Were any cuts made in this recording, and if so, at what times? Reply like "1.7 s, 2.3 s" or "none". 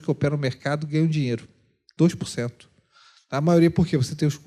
none